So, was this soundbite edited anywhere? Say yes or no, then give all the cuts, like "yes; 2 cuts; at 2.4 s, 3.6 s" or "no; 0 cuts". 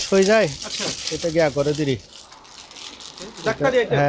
no; 0 cuts